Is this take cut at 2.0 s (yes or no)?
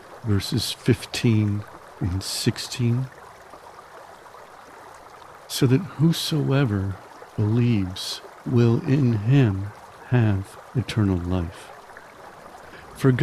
no